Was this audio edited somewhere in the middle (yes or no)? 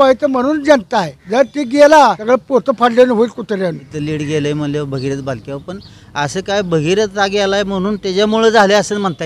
yes